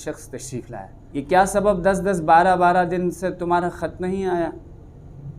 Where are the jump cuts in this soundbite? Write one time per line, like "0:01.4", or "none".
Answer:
0:01.0